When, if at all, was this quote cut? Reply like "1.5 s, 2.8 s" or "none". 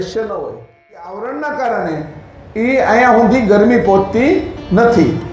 1.1 s